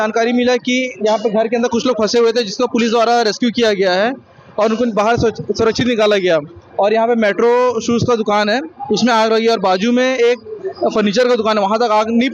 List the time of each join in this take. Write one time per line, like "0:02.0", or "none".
none

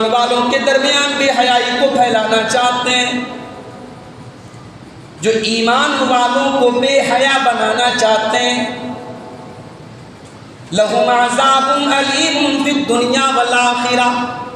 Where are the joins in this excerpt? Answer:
none

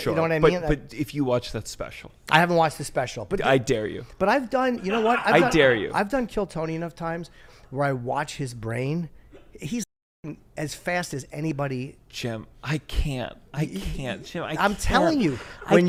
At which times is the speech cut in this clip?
none

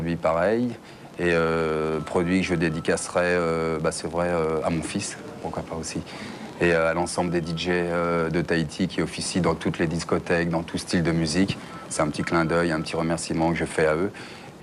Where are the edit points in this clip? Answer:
0:07.2

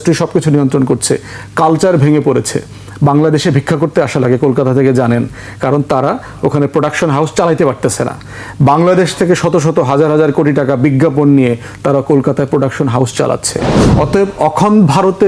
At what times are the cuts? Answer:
0:13.8

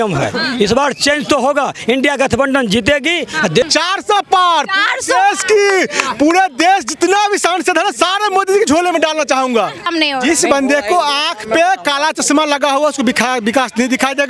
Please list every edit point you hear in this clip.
0:03.6
0:09.9

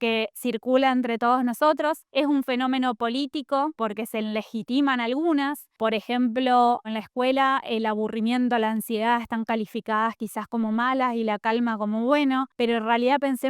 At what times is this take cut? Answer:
0:02.0
0:03.7
0:05.6
0:06.9

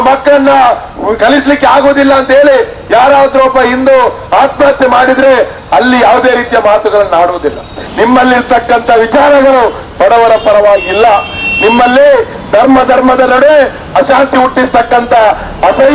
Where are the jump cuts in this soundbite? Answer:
none

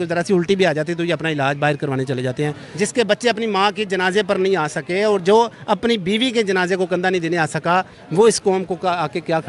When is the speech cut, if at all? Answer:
0:02.6

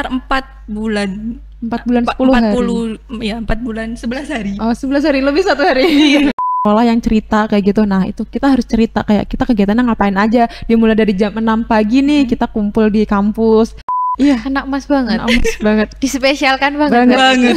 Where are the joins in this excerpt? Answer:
0:06.4
0:14.0

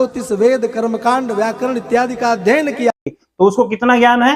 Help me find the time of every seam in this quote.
0:03.0

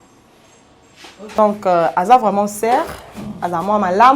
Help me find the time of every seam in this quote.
0:01.4

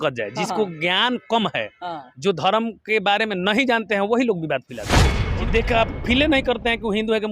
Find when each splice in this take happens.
0:05.2

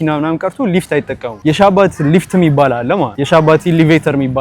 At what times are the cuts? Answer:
0:01.2
0:03.2

